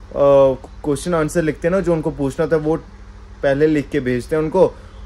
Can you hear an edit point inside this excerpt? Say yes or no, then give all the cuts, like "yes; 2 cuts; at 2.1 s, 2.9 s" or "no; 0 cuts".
no; 0 cuts